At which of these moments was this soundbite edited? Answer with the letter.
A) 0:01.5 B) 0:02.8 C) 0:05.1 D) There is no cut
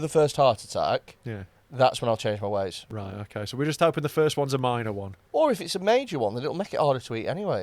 C